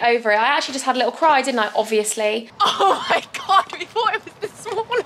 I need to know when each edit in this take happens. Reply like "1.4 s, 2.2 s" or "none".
2.5 s